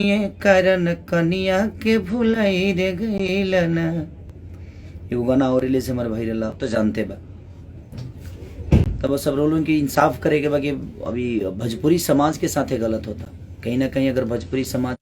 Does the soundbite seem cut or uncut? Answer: cut